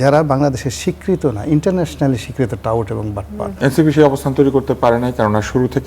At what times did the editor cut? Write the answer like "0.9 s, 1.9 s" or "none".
3.5 s